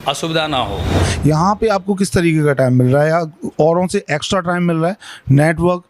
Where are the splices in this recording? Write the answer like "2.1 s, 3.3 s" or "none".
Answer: 1.1 s